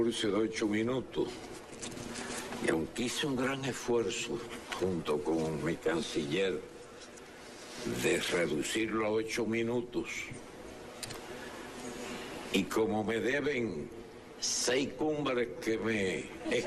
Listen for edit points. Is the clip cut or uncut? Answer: cut